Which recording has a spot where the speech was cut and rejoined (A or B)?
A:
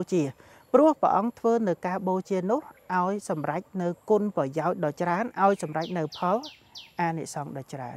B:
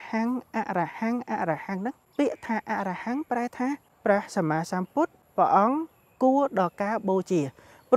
B